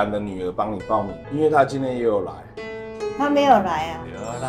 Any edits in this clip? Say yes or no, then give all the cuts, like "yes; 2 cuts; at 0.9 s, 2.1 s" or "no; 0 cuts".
yes; 1 cut; at 1.2 s